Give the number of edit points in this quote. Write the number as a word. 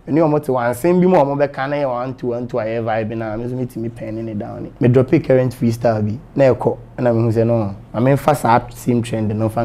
one